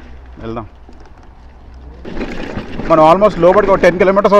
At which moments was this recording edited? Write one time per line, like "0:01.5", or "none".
0:02.0